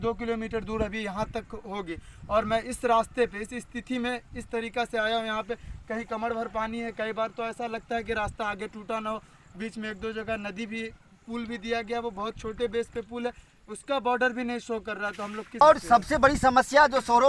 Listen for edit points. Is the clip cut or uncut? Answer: cut